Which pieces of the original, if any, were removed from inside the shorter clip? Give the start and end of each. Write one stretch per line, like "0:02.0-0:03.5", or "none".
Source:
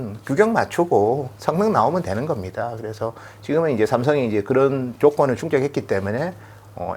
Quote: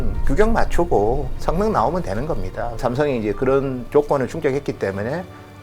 0:02.8-0:03.9